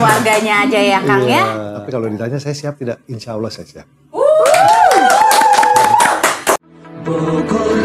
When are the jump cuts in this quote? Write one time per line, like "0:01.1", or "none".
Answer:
0:01.7
0:06.6